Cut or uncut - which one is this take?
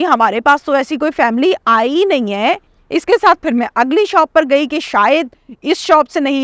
cut